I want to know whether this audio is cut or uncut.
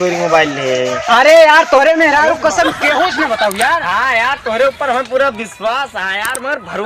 uncut